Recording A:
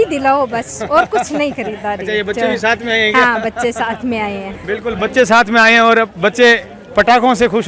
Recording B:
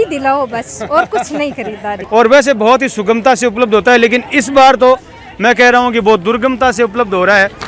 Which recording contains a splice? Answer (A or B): B